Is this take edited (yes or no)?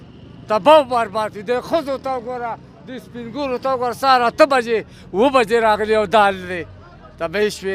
no